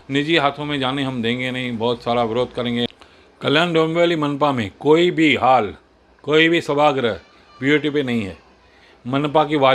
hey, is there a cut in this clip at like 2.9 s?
yes; 1 cut; at 2.9 s

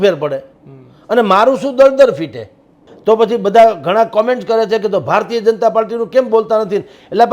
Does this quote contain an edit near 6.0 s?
no; 1 cut; at 2.9 s

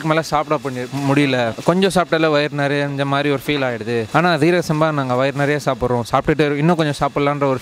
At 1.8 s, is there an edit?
no; 0 cuts

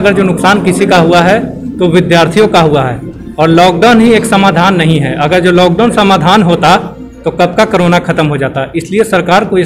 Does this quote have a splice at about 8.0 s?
no; 0 cuts

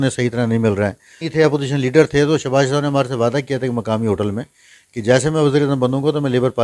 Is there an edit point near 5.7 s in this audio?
no; 1 cut; at 1.3 s

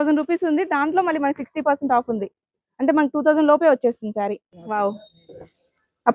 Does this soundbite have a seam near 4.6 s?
yes; 1 cut; at 4.6 s

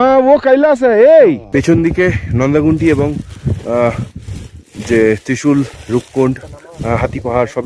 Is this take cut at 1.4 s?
yes; 1 cut; at 1.4 s

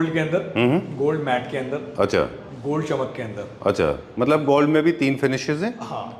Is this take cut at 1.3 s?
no; 0 cuts

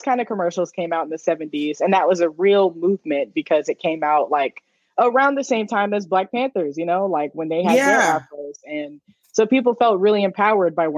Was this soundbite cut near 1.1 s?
no; 0 cuts

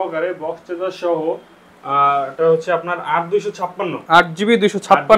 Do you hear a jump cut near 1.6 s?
no; 0 cuts

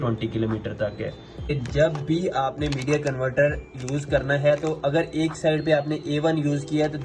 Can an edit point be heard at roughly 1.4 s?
yes; 1 cut; at 1.4 s

